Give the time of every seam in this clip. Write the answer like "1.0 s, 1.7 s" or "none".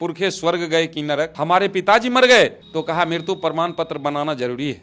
1.3 s